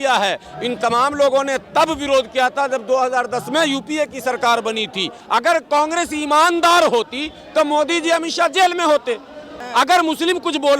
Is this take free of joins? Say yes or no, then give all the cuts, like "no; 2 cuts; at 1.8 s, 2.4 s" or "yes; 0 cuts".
no; 2 cuts; at 5.2 s, 9.6 s